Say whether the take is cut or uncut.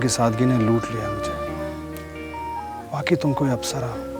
cut